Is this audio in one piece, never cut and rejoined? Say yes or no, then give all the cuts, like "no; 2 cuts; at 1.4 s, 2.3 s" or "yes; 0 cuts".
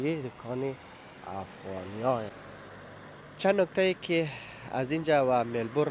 no; 1 cut; at 2.4 s